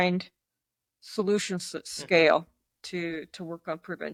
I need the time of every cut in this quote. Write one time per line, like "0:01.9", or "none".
none